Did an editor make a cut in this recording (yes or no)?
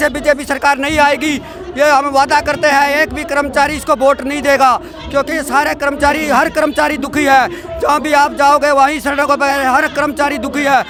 no